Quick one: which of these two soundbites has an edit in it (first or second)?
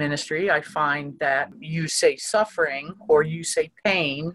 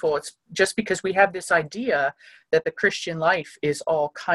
first